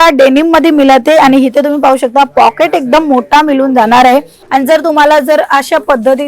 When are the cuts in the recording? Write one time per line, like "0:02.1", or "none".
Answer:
0:04.4